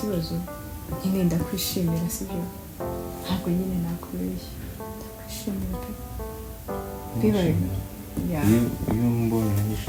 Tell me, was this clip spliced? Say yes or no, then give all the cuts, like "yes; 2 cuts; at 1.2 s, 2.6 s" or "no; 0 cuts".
no; 0 cuts